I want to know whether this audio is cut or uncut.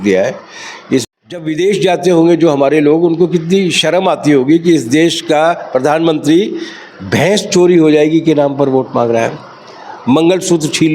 cut